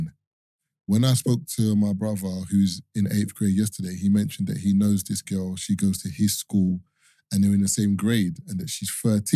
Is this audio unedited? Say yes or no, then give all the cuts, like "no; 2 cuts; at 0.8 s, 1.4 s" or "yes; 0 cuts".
yes; 0 cuts